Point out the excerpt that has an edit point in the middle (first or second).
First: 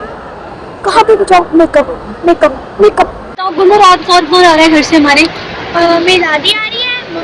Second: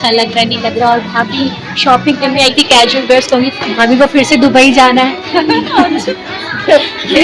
first